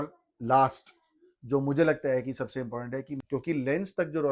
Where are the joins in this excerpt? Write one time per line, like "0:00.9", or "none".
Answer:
0:03.1